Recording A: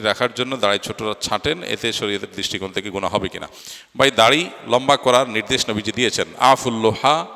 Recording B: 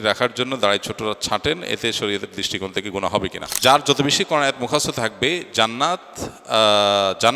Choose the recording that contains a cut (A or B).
B